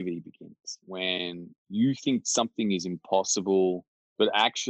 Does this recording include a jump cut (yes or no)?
yes